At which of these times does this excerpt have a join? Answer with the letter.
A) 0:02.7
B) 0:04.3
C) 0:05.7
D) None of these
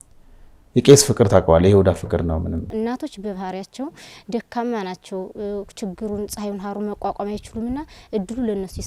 A